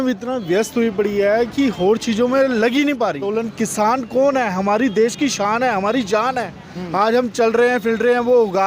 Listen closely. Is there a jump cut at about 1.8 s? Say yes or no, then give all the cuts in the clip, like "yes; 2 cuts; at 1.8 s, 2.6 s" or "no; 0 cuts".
no; 1 cut; at 3.3 s